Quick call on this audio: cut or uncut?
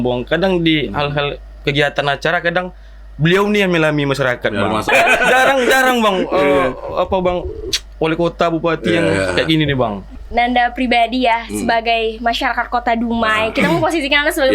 cut